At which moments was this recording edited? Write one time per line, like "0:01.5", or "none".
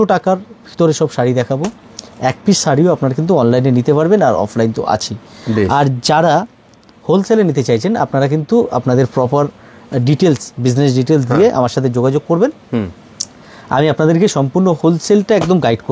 none